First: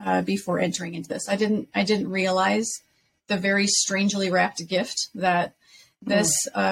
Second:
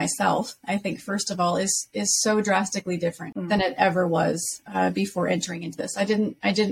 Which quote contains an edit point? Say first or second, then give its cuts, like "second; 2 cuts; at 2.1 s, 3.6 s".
second; 1 cut; at 3.3 s